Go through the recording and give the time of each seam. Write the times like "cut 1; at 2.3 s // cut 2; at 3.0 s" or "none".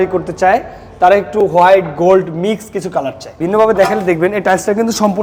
cut 1; at 3.4 s